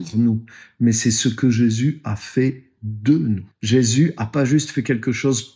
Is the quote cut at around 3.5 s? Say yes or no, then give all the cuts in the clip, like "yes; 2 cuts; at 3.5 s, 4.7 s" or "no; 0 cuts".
yes; 1 cut; at 3.5 s